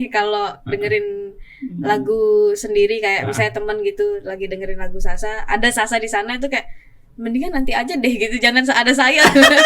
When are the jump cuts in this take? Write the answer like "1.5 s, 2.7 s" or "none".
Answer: none